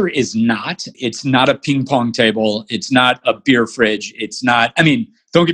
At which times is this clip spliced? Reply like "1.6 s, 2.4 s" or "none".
0.9 s